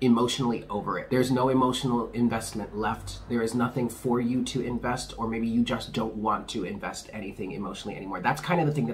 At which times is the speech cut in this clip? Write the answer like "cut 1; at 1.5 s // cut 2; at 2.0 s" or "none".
cut 1; at 1.0 s